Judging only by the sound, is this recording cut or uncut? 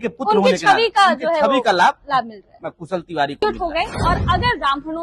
cut